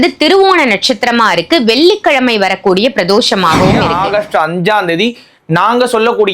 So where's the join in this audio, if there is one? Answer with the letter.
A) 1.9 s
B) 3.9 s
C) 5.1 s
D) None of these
B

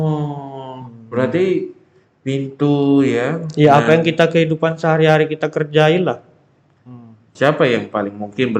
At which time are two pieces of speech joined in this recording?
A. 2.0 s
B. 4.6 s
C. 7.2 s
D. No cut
C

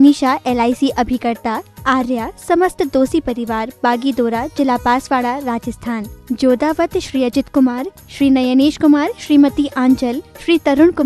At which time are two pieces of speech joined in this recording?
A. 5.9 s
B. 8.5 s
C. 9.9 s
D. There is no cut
D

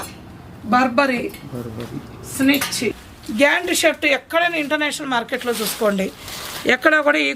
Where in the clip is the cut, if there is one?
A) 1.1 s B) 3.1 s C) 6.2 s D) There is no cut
B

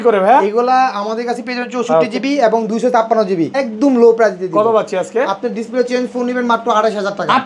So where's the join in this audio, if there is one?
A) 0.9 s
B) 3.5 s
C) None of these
B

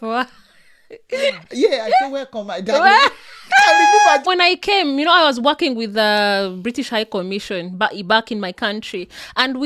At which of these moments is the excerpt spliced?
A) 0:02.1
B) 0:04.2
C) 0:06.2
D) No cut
B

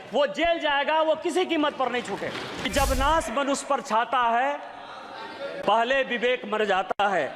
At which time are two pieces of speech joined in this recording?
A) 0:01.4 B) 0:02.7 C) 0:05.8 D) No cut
B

